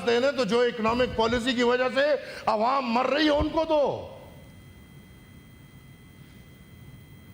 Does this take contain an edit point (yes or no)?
no